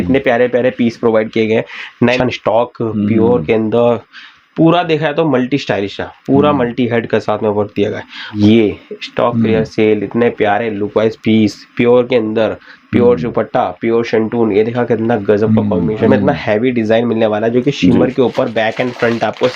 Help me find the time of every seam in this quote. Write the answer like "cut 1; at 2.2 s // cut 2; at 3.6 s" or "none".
cut 1; at 2.2 s // cut 2; at 8.3 s // cut 3; at 16.1 s